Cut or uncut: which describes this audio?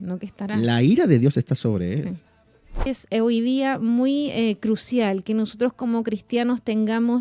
cut